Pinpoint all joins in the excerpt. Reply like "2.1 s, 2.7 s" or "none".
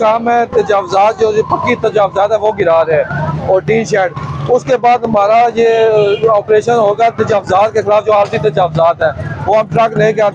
none